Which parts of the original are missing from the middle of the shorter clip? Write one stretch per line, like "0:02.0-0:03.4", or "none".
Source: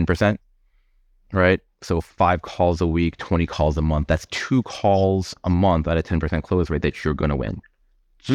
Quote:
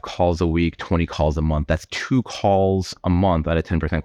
none